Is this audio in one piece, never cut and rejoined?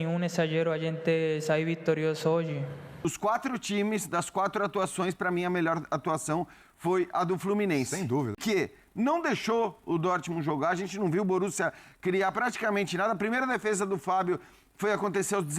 no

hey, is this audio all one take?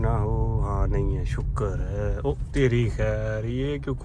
yes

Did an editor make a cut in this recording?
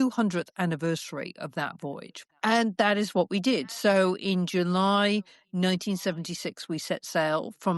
no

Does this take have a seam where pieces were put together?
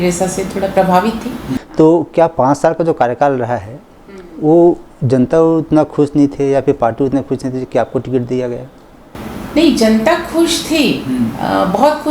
yes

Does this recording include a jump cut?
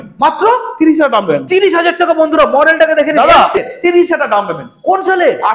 yes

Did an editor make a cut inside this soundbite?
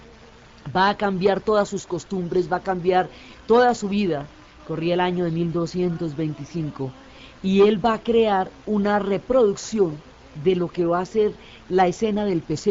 no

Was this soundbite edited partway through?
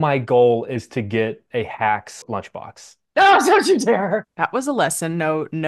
yes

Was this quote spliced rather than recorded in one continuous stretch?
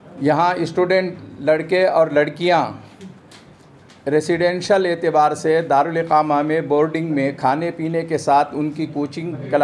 no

